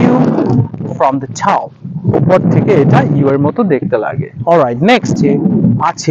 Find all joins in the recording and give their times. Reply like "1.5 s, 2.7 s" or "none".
5.1 s